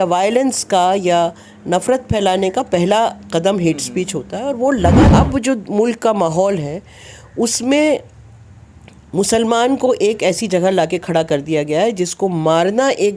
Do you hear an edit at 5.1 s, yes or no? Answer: yes